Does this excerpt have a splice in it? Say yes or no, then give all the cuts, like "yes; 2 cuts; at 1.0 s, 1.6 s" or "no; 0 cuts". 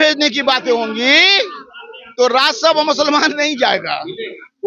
no; 0 cuts